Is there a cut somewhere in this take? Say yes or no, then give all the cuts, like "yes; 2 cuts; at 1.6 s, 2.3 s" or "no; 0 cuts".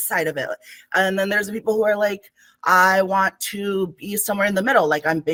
no; 0 cuts